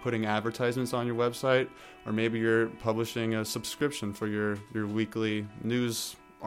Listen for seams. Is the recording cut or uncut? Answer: cut